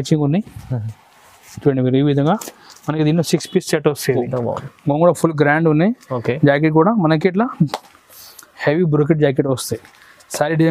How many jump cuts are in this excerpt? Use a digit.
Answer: 1